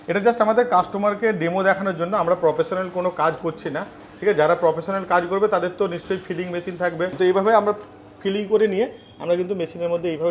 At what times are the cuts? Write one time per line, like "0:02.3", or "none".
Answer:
0:07.1